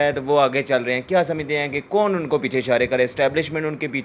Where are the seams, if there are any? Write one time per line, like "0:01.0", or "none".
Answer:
none